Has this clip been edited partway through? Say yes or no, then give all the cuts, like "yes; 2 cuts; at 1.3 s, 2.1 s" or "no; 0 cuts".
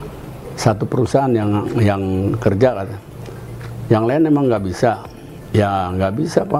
no; 0 cuts